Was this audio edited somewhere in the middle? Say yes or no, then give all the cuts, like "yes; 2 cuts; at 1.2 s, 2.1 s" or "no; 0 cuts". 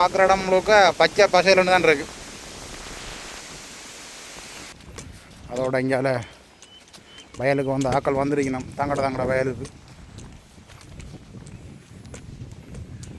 yes; 1 cut; at 4.7 s